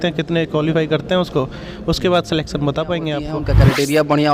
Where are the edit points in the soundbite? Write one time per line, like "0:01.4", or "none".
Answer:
0:03.4

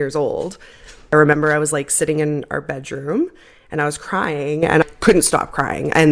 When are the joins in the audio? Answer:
0:00.9
0:04.9

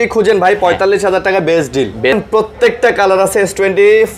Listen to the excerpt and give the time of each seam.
0:02.1

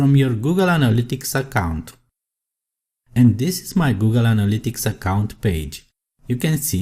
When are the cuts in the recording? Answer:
0:03.2

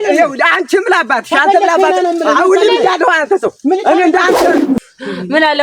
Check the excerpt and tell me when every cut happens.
0:04.7

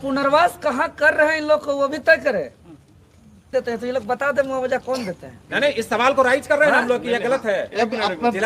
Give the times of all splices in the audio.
0:03.4

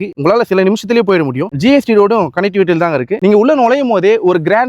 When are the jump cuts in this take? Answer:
0:03.1

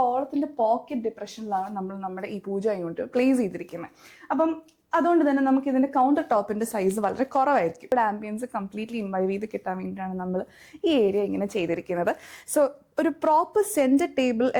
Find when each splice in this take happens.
0:07.9

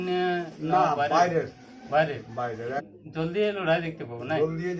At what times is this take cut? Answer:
0:02.8

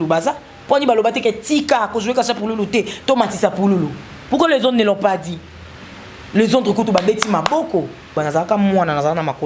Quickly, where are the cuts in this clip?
0:08.2

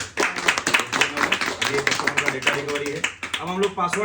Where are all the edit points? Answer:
none

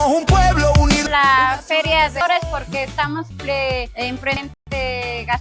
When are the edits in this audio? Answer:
0:01.1
0:02.2
0:03.3
0:04.5

